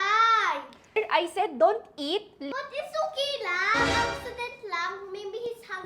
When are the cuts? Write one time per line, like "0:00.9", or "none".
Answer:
0:00.9
0:02.4